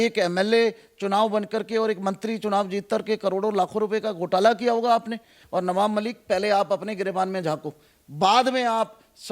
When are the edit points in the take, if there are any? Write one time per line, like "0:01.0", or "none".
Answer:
0:05.3